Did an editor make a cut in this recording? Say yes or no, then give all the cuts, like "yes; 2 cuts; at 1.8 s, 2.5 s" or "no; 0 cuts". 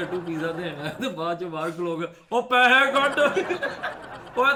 no; 0 cuts